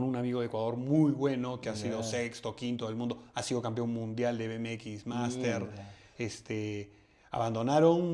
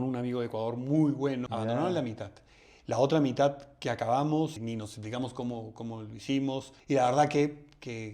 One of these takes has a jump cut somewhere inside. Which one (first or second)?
second